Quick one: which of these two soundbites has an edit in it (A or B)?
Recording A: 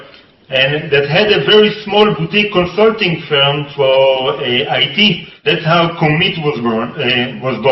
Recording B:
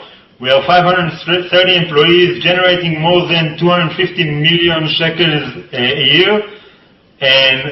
A